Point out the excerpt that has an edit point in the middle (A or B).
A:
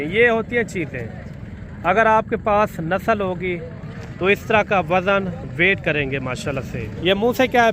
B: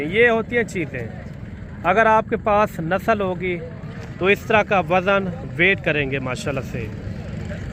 A